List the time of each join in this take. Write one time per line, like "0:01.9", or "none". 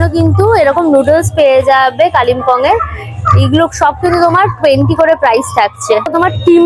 none